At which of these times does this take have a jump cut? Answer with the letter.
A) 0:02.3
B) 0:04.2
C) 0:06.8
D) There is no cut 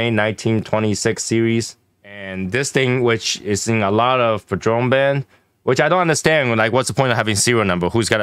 A